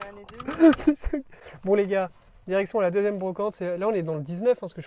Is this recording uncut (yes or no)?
yes